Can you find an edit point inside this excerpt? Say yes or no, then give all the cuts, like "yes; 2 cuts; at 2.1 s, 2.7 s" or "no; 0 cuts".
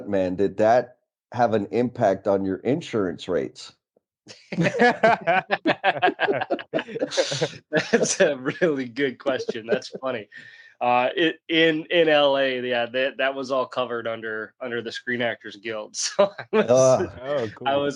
no; 0 cuts